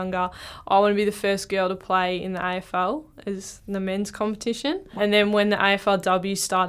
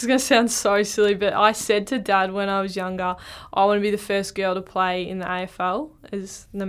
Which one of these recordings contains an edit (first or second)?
first